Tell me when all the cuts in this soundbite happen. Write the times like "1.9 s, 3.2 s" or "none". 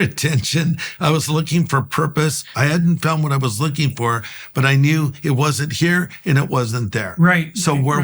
2.4 s